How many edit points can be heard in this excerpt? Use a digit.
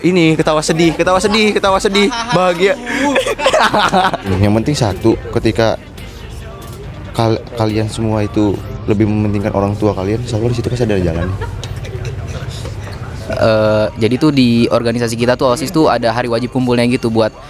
2